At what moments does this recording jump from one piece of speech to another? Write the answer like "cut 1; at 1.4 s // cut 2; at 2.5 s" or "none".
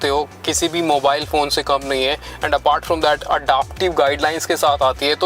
none

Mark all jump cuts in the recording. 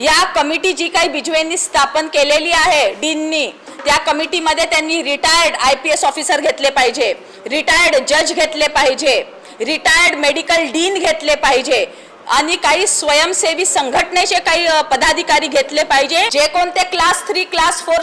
cut 1; at 16.3 s

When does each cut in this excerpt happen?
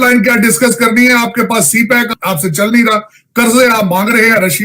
cut 1; at 2.1 s

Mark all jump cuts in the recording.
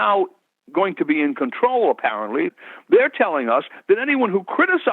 cut 1; at 2.6 s

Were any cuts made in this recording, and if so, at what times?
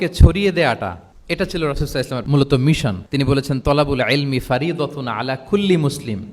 cut 1; at 1.1 s // cut 2; at 2.2 s // cut 3; at 3.0 s

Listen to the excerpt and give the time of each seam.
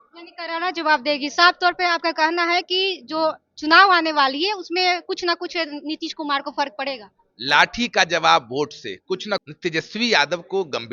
cut 1; at 9.4 s

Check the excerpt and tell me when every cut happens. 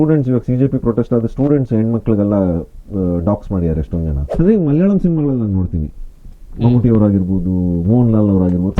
cut 1; at 4.3 s

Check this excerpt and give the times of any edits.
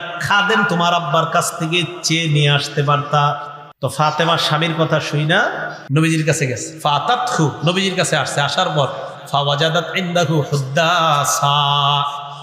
cut 1; at 3.9 s // cut 2; at 5.7 s

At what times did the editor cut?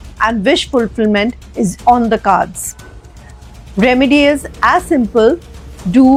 none

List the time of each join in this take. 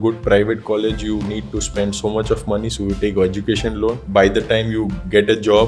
cut 1; at 4.0 s

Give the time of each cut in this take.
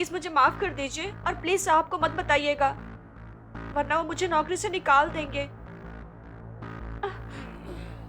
none

